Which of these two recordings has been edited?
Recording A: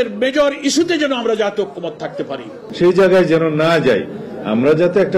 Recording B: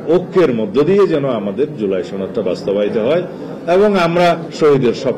A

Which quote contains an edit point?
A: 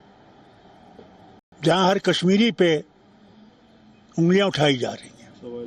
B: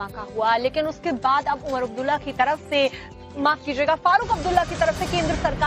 B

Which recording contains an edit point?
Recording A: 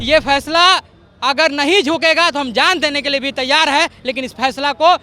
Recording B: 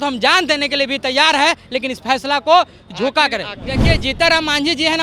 B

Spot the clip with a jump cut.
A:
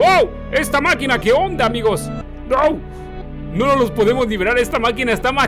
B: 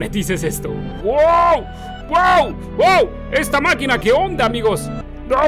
B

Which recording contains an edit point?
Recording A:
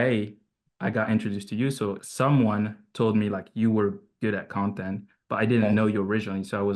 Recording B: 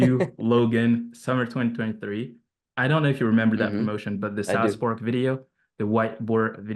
A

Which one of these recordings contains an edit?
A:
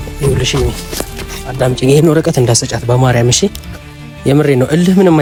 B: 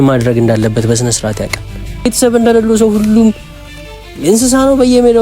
B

